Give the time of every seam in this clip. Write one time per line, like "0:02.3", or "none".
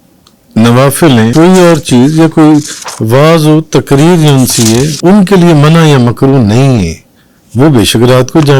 0:01.3
0:05.0